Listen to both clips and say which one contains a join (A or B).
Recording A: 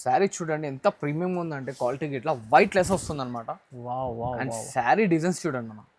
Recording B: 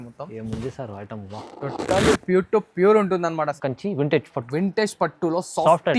B